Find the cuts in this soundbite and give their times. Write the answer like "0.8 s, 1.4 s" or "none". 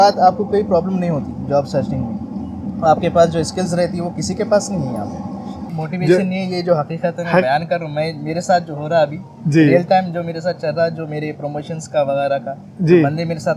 5.7 s